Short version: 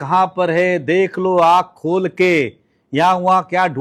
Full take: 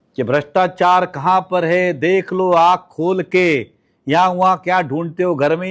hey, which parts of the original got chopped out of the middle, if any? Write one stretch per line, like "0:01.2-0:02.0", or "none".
none